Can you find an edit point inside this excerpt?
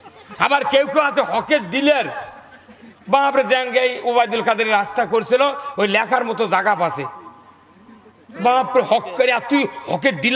no; 0 cuts

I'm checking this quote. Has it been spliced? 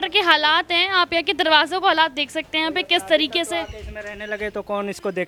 no; 0 cuts

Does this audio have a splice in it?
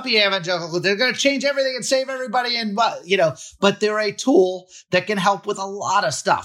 no; 0 cuts

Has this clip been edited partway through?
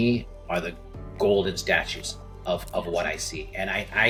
no; 0 cuts

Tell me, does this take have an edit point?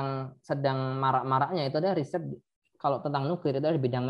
no; 0 cuts

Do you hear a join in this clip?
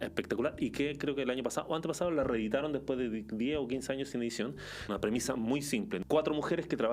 yes; 2 cuts; at 4.4 s, 6.0 s

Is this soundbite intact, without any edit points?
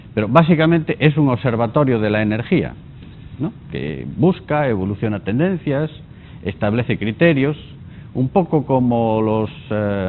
yes; 0 cuts

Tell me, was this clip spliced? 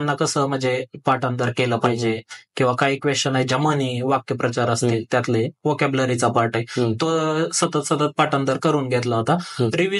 no; 0 cuts

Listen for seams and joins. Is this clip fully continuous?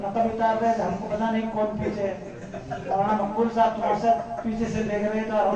yes; 0 cuts

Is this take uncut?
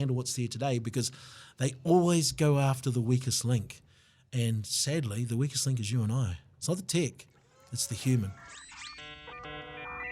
no; 1 cut; at 8.8 s

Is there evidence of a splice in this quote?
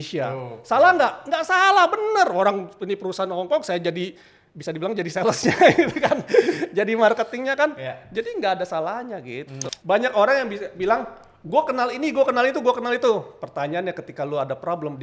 yes; 1 cut; at 9.6 s

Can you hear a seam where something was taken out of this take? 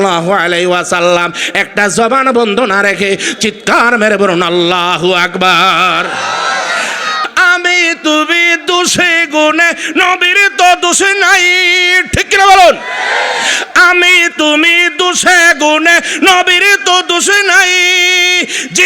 yes; 1 cut; at 7.2 s

